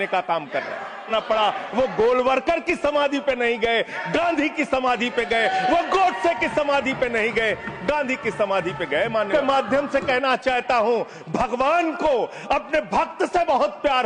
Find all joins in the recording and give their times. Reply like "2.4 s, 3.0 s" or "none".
1.1 s, 9.3 s